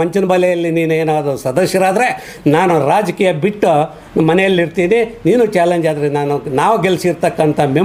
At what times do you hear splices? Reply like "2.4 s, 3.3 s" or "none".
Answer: none